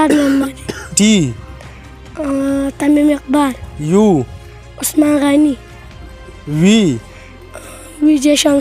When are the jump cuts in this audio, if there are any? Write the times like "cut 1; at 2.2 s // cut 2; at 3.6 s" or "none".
none